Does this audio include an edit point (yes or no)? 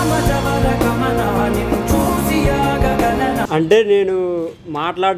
yes